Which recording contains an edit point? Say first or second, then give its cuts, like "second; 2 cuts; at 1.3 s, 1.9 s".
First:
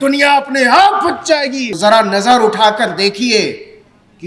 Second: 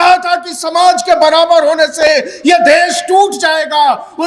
first; 1 cut; at 1.7 s